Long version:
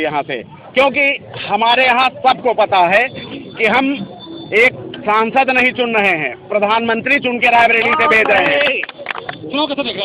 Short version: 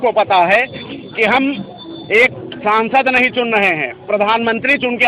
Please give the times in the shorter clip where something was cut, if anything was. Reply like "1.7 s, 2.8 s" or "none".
none